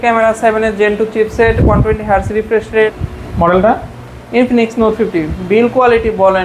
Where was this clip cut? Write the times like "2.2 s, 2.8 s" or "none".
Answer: 3.0 s